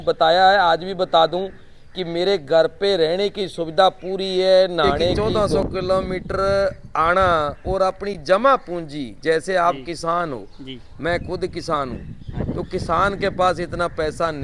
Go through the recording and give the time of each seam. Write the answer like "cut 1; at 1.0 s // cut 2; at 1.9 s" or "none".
cut 1; at 5.1 s

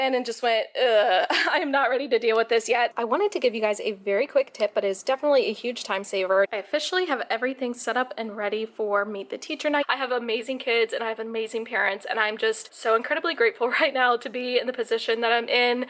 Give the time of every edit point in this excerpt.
cut 1; at 2.9 s // cut 2; at 6.5 s // cut 3; at 9.8 s

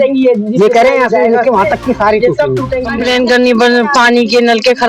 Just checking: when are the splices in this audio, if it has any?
cut 1; at 2.8 s

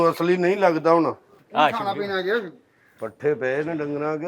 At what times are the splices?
cut 1; at 1.4 s

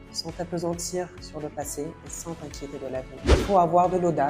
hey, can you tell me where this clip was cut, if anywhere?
cut 1; at 3.4 s

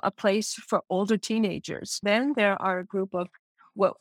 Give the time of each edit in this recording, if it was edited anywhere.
cut 1; at 2.0 s

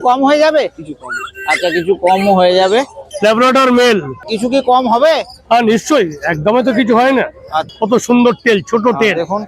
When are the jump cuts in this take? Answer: cut 1; at 3.0 s // cut 2; at 4.3 s // cut 3; at 7.6 s

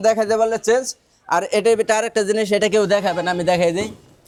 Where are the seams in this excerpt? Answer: none

